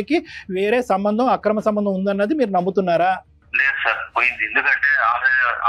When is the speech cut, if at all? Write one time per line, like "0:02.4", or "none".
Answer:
0:03.4